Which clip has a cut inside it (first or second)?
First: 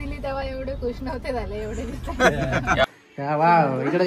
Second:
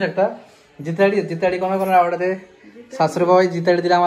first